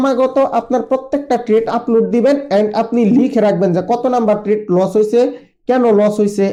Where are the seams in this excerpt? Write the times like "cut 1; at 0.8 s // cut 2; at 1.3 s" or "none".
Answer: none